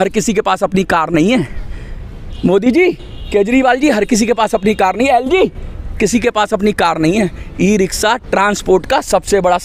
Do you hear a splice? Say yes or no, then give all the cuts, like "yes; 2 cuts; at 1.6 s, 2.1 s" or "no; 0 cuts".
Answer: no; 0 cuts